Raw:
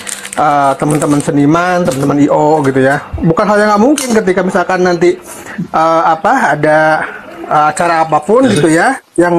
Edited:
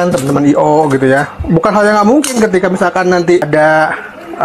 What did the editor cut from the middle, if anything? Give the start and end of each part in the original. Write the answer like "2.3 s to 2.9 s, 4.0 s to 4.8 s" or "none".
5.2 s to 6.6 s